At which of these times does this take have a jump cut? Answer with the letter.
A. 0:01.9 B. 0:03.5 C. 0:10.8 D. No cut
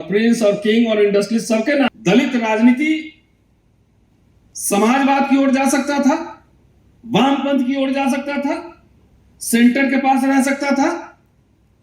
A